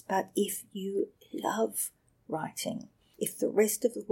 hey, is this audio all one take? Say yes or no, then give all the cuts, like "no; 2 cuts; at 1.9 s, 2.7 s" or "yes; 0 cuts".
no; 1 cut; at 3.0 s